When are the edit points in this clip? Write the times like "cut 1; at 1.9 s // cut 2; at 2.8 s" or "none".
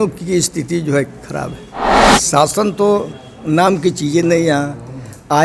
cut 1; at 2.1 s